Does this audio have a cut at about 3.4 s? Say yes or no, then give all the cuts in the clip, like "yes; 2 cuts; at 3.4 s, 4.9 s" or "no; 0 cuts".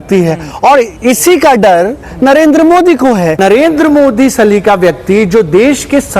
yes; 1 cut; at 3.4 s